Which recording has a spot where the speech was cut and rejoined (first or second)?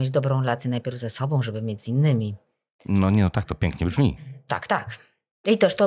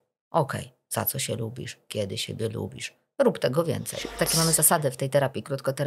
second